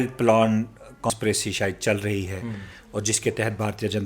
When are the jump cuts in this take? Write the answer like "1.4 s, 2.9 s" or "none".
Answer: 1.1 s